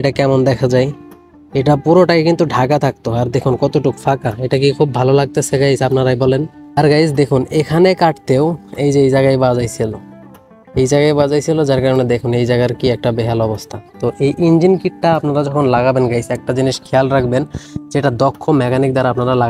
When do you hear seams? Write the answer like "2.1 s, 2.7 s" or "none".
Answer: none